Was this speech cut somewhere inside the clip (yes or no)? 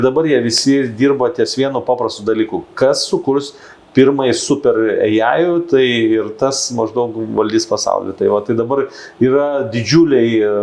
no